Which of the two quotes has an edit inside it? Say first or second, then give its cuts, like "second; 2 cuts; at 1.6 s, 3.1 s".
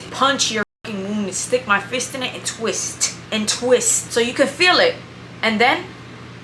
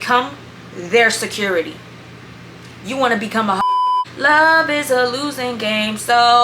second; 1 cut; at 3.6 s